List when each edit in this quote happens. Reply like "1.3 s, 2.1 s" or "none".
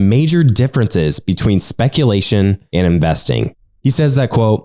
2.6 s, 3.6 s